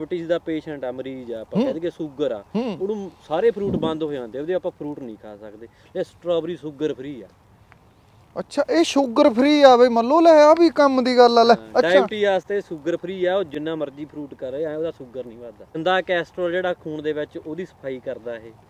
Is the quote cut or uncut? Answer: cut